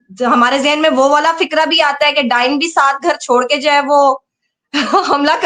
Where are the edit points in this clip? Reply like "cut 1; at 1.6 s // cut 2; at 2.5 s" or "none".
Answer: none